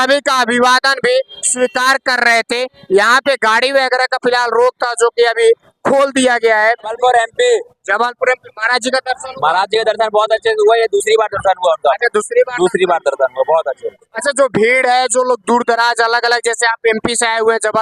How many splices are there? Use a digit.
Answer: 1